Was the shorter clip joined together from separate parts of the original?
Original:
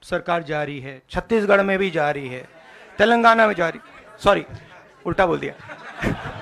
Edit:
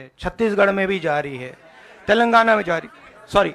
no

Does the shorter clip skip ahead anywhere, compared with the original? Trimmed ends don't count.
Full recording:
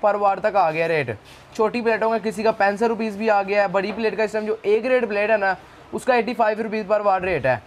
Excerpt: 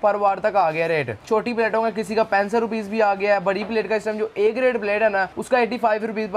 yes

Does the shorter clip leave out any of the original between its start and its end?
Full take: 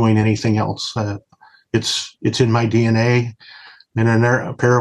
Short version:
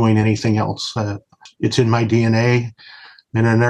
yes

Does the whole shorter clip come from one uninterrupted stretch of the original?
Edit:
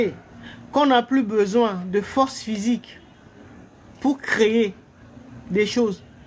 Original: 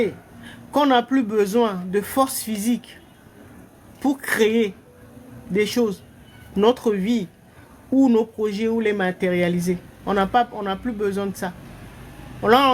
yes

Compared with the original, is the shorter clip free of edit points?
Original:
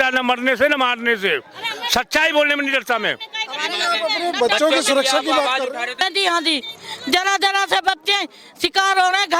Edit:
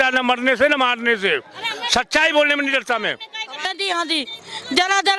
no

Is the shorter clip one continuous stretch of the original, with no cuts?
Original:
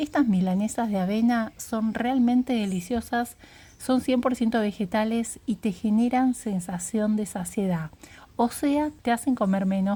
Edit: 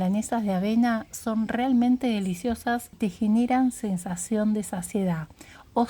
no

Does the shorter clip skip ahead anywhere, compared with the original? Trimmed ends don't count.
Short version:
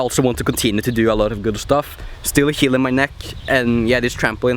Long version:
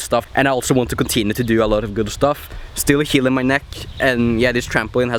no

